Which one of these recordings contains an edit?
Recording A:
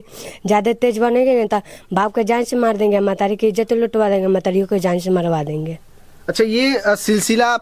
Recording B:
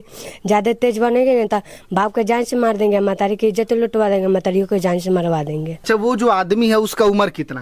B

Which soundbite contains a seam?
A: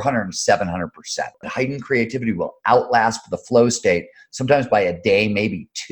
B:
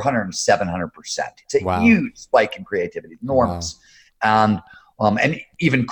A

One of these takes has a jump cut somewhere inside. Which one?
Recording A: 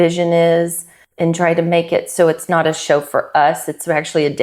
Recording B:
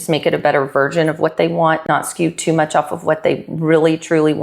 B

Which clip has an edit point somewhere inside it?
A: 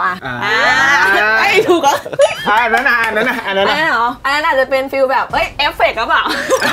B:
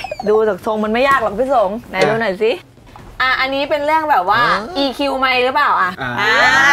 B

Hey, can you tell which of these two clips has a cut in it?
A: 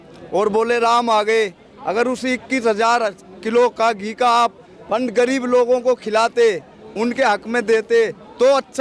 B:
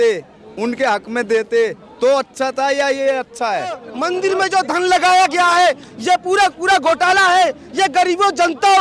B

